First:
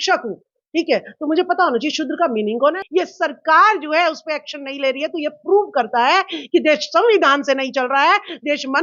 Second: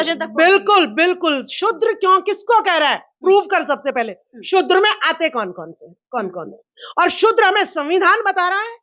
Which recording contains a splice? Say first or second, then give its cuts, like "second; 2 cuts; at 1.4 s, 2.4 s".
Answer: first; 1 cut; at 2.8 s